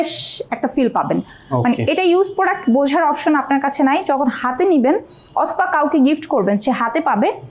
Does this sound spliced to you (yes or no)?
no